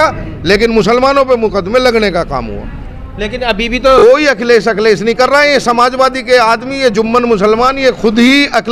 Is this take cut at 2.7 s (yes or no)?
no